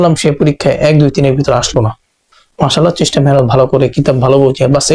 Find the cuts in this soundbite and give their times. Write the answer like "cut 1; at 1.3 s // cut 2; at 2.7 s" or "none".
cut 1; at 2.4 s